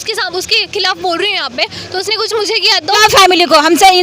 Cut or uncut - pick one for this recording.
cut